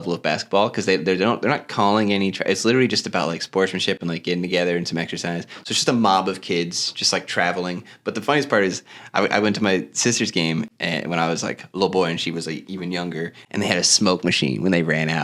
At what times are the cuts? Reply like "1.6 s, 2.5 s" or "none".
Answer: none